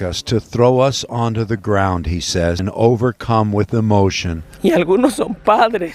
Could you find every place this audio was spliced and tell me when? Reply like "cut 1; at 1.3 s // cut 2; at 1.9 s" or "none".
cut 1; at 2.6 s